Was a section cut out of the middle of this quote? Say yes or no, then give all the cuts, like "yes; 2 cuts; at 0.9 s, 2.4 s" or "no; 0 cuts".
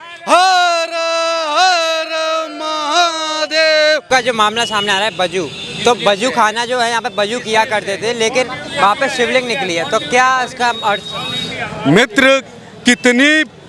no; 0 cuts